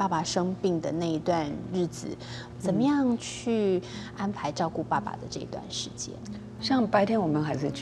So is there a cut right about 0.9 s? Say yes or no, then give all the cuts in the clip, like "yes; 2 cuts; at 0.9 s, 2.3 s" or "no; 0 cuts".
no; 1 cut; at 2.4 s